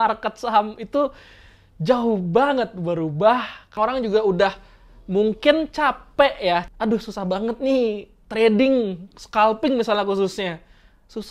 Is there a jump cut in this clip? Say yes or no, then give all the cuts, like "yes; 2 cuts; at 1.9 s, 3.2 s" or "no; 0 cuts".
yes; 2 cuts; at 3.8 s, 6.7 s